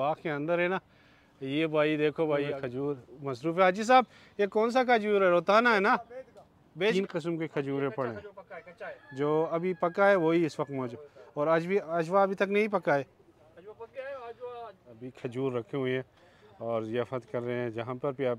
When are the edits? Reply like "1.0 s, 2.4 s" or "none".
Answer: 2.6 s, 6.9 s, 15.1 s